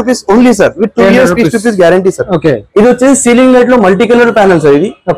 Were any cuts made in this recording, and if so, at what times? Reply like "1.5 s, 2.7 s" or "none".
2.6 s